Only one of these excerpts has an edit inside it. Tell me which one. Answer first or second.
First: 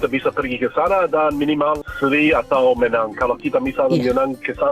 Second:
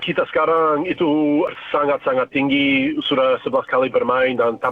second